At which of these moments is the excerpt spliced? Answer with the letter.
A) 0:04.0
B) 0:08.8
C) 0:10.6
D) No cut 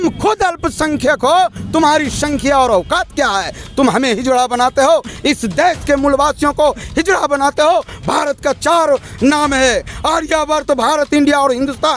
D